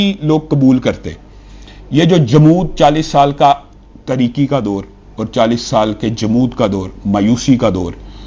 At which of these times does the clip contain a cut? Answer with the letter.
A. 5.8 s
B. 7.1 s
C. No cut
C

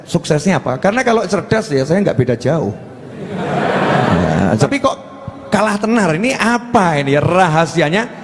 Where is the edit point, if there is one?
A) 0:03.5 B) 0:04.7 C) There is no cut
B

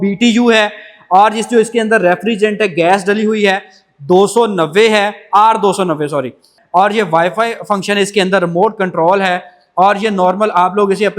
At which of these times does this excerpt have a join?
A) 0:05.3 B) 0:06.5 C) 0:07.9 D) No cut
B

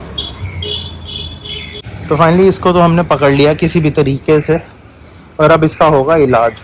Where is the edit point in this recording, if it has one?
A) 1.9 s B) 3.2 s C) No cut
A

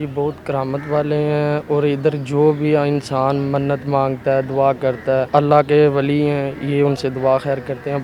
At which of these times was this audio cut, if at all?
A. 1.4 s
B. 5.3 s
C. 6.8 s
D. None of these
B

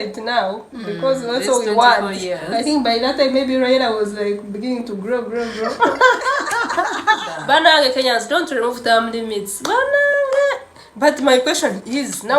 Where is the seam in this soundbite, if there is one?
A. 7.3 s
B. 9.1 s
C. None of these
A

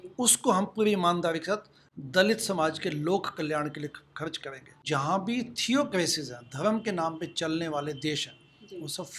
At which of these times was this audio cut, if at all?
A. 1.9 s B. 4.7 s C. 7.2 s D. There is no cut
B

